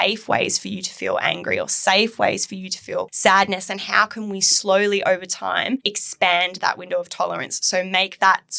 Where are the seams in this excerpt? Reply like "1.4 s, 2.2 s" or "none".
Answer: 3.1 s, 6.0 s